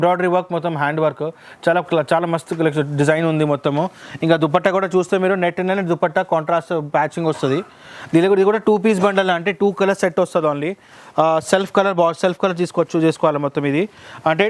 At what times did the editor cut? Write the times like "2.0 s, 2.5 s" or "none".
none